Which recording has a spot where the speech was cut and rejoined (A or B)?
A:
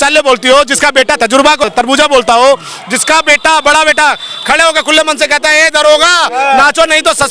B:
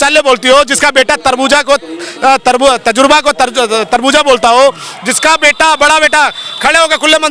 A